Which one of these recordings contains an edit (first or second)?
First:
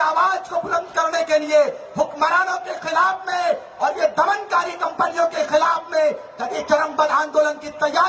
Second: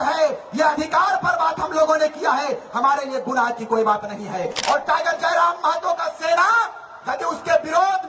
second